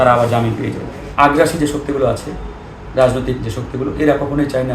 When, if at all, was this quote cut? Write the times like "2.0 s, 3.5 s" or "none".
1.0 s